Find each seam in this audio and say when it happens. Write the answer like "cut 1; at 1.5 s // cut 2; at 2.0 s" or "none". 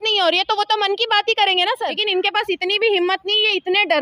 cut 1; at 1.9 s